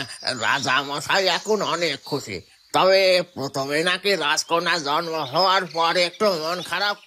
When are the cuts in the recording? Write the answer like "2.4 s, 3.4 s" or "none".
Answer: none